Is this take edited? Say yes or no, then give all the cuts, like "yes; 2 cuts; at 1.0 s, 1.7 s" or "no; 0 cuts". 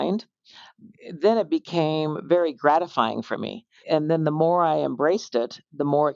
yes; 1 cut; at 3.8 s